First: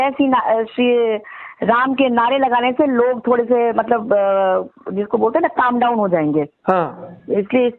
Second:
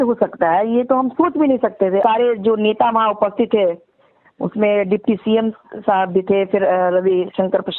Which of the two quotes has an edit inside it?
second; 1 cut; at 2.0 s

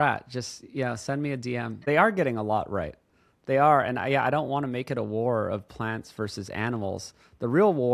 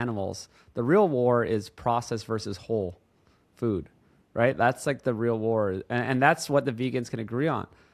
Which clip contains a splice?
first; 1 cut; at 1.8 s

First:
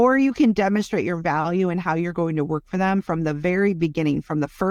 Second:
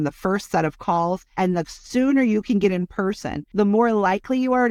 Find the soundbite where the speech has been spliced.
second; 2 cuts; at 1.3 s, 3.4 s

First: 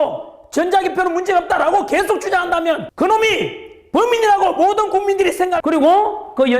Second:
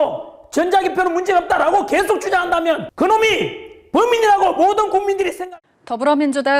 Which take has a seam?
first; 1 cut; at 5.5 s

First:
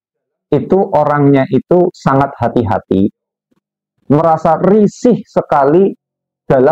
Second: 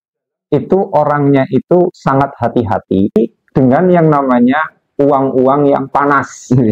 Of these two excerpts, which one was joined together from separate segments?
second; 1 cut; at 3.2 s

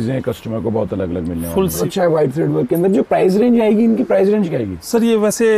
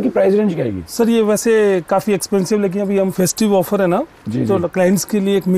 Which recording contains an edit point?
first; 1 cut; at 1.8 s

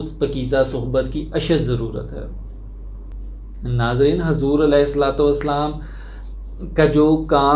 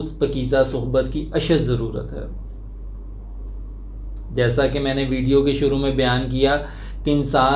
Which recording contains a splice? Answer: first; 1 cut; at 3.1 s

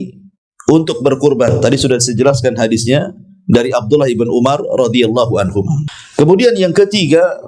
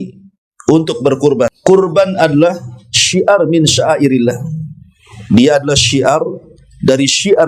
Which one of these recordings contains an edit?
second; 1 cut; at 1.5 s

